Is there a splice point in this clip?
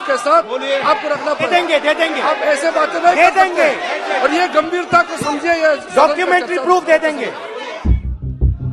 yes; 1 cut; at 7.7 s

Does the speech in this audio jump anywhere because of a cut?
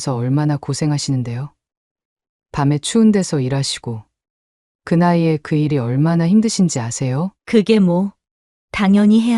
yes; 1 cut; at 7.3 s

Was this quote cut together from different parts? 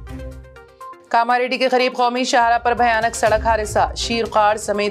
yes; 1 cut; at 0.9 s

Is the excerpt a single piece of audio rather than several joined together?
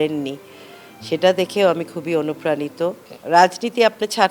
no; 1 cut; at 3.1 s

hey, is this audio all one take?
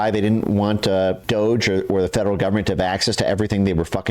yes; 0 cuts

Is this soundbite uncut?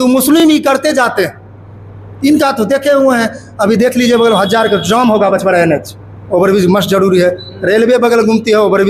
yes; 0 cuts

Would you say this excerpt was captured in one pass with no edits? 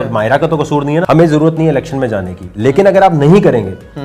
no; 1 cut; at 1.1 s

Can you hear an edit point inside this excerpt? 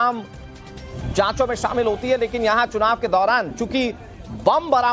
yes; 1 cut; at 3.5 s

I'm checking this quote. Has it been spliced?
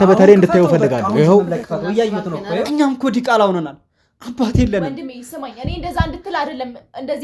yes; 1 cut; at 2.6 s

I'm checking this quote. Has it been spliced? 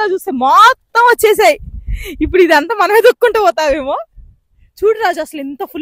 no; 0 cuts

